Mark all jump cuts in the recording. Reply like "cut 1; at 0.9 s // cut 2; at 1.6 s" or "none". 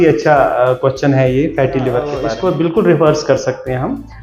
cut 1; at 2.2 s